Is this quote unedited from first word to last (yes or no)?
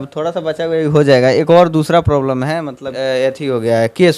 no